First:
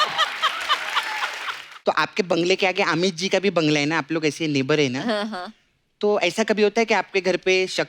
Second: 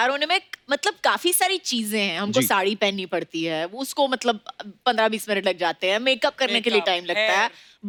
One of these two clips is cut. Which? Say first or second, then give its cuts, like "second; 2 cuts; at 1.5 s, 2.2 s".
first; 1 cut; at 1.6 s